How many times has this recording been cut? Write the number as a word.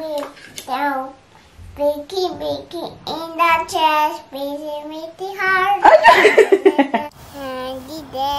one